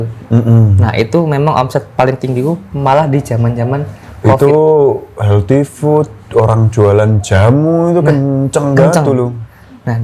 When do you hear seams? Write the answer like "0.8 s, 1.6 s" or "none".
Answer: none

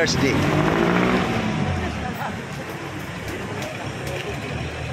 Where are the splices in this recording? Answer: none

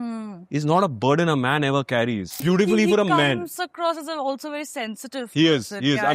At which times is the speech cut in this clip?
2.3 s

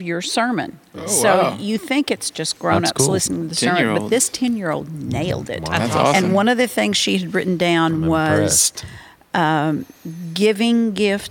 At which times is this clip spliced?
none

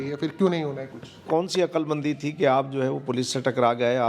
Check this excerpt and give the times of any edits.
1.3 s

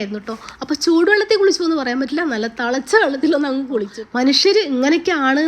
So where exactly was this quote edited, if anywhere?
4.0 s

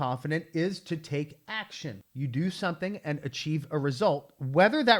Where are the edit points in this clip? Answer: none

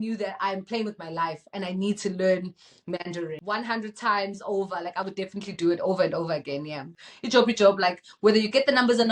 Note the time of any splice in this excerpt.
3.3 s, 6.9 s

